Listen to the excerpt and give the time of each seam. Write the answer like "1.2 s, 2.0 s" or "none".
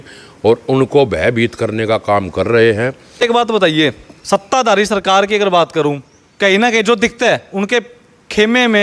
3.2 s